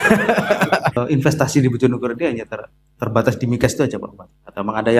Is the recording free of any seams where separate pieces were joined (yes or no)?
no